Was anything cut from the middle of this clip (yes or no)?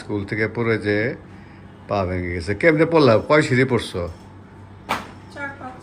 no